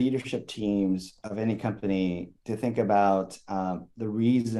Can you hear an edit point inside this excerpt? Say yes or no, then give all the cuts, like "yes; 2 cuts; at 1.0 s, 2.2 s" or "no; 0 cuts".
no; 0 cuts